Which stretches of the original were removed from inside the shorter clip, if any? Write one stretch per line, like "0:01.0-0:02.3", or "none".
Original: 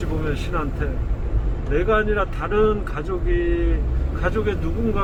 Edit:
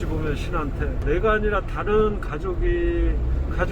0:01.0-0:01.6